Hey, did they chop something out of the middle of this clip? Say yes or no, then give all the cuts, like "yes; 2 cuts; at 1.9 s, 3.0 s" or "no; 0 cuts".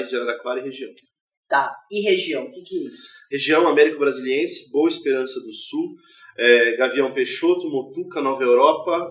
yes; 1 cut; at 5.3 s